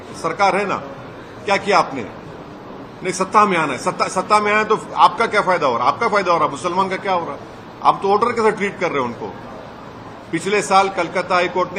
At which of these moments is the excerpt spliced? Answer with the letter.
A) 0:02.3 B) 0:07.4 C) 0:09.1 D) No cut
D